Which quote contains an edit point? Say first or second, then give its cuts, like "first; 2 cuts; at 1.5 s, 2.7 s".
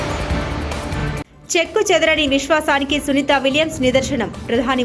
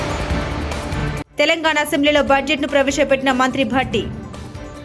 first; 1 cut; at 0.9 s